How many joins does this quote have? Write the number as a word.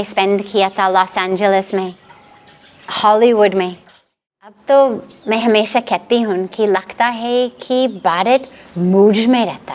one